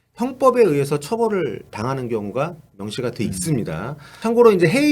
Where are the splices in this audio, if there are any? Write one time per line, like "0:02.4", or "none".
0:04.0